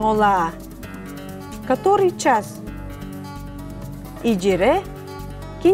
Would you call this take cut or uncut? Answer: uncut